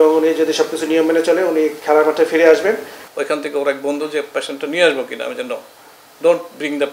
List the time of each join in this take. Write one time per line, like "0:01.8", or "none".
0:03.0

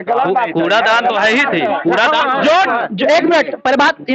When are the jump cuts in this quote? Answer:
none

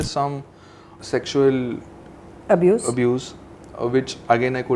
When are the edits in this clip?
0:00.9

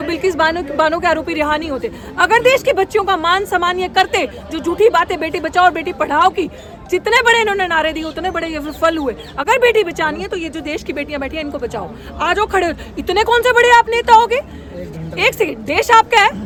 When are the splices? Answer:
none

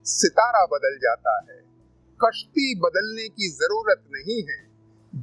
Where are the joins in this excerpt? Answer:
none

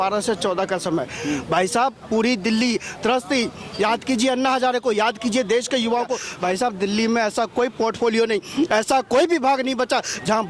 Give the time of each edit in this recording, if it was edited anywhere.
0:06.2

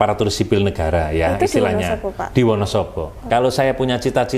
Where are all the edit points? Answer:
0:03.2

